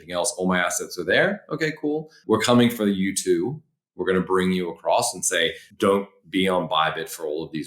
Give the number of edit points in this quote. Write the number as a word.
two